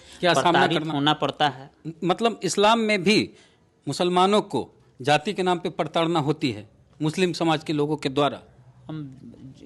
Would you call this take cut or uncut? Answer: uncut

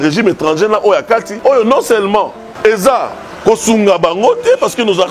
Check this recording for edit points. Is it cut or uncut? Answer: cut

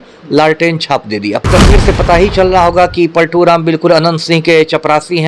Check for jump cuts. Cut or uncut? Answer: cut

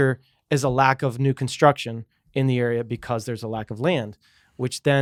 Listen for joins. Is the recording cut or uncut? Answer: uncut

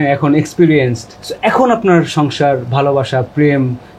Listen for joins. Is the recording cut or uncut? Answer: uncut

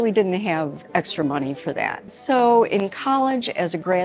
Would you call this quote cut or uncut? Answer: cut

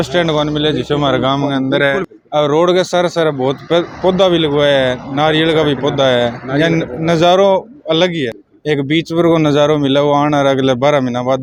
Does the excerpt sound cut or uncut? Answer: uncut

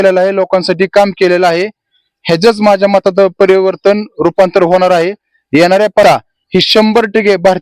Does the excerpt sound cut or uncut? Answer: cut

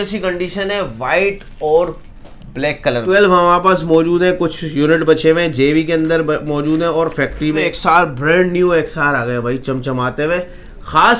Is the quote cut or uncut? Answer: cut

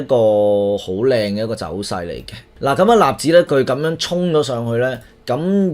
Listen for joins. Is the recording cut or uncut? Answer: cut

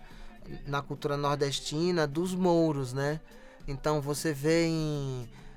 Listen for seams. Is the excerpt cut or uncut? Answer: uncut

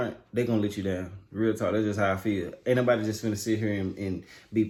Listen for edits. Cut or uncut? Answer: uncut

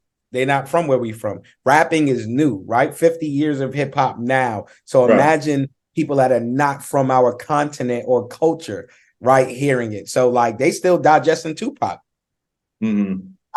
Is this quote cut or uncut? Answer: uncut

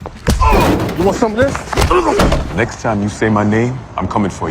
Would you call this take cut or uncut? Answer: cut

